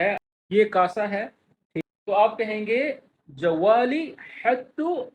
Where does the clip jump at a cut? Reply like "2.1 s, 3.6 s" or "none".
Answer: 1.7 s